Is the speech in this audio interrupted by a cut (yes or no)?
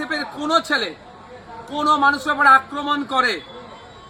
no